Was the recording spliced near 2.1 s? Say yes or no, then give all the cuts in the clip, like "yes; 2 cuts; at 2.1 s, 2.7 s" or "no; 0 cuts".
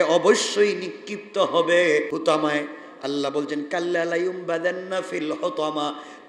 yes; 1 cut; at 2.1 s